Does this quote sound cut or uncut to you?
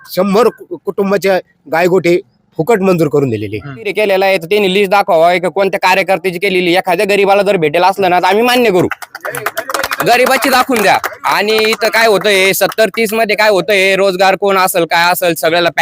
cut